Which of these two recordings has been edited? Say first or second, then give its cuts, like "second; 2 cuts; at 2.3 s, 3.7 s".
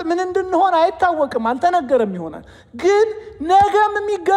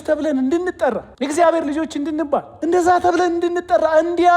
second; 2 cuts; at 1.1 s, 2.5 s